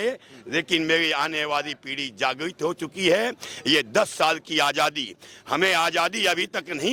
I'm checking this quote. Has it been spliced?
no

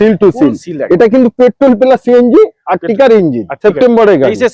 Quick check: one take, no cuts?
no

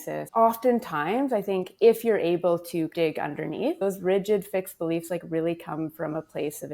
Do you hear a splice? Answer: yes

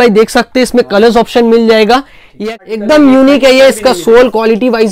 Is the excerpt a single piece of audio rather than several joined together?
no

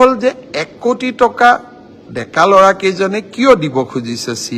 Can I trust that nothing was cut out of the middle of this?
yes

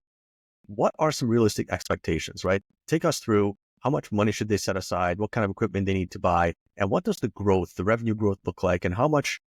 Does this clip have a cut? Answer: no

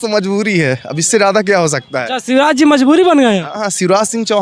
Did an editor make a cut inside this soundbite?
no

